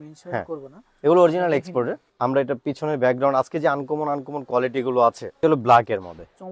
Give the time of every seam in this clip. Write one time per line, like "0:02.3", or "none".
0:02.0
0:05.4